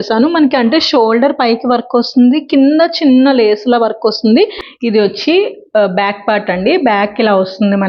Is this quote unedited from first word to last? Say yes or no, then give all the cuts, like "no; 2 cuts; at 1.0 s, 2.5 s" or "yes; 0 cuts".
no; 1 cut; at 4.7 s